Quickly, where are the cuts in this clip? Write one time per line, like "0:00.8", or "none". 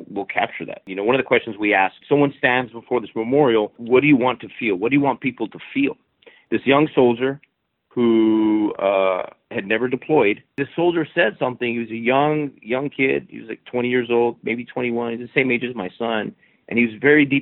0:00.9
0:02.0
0:03.8
0:06.3
0:10.7